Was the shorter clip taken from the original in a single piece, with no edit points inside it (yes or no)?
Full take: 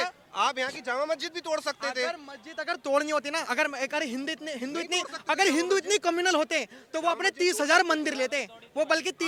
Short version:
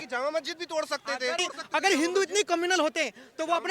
no